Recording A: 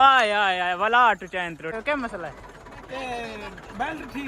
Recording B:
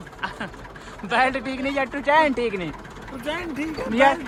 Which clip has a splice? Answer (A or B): A